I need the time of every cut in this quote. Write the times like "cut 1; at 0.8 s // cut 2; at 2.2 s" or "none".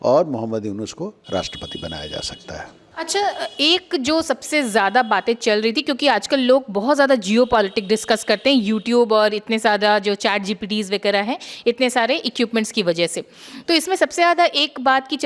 none